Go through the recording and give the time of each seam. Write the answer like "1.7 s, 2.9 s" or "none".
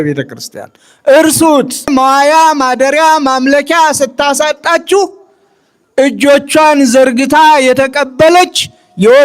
1.9 s